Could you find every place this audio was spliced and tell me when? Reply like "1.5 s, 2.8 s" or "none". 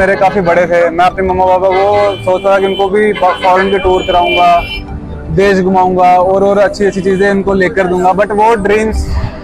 none